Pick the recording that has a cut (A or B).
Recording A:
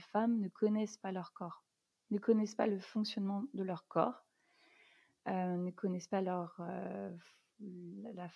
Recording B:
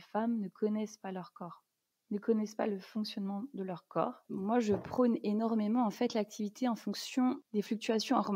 B